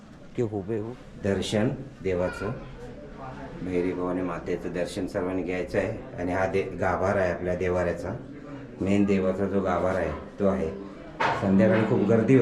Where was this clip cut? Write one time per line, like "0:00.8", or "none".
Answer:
0:01.0